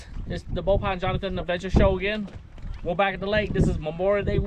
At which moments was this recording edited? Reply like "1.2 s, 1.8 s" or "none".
none